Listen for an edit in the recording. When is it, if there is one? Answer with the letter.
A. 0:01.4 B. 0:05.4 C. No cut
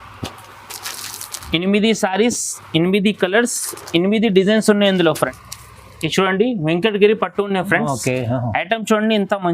B